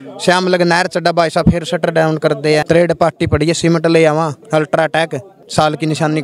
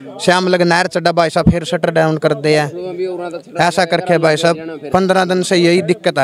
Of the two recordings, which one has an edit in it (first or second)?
first